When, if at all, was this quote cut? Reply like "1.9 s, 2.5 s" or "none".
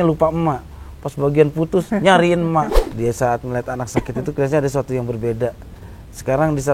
2.8 s